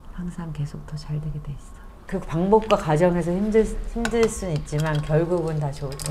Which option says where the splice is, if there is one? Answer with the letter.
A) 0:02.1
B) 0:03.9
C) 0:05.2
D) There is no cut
D